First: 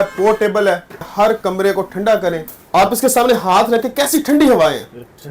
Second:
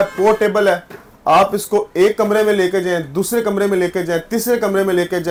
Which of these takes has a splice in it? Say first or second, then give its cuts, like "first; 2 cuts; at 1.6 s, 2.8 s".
first; 2 cuts; at 1.1 s, 2.5 s